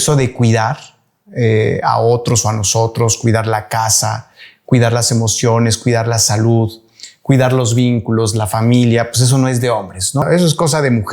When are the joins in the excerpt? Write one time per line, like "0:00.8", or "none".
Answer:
0:10.2